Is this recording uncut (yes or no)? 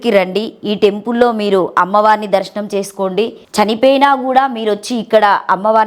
no